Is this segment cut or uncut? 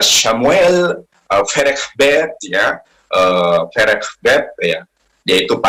uncut